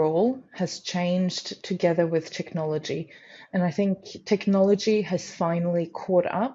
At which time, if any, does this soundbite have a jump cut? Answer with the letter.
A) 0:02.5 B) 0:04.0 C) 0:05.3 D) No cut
D